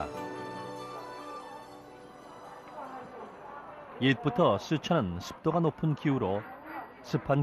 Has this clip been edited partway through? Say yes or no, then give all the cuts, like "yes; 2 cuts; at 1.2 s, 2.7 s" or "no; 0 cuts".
no; 0 cuts